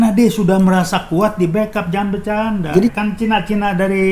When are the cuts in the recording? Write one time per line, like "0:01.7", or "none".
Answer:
0:02.9